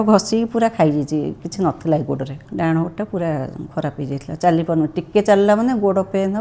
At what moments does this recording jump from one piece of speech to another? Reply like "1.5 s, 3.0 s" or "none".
2.4 s